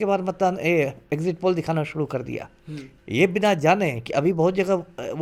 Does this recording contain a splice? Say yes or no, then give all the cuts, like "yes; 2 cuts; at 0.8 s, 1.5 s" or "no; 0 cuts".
no; 0 cuts